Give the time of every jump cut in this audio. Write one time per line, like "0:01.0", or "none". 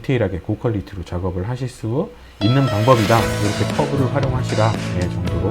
none